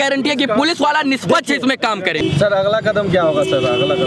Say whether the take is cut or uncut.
cut